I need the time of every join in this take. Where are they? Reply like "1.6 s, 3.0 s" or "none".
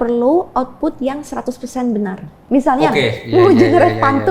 2.3 s